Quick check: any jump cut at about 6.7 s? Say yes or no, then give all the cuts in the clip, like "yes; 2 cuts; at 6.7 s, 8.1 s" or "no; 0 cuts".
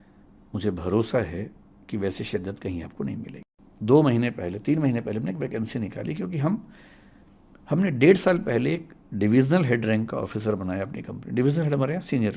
no; 1 cut; at 3.4 s